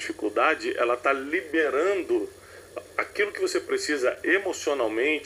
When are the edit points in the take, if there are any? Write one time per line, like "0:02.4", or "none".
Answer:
none